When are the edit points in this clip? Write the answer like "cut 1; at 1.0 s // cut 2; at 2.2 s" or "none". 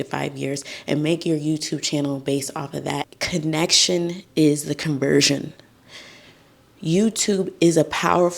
cut 1; at 3.1 s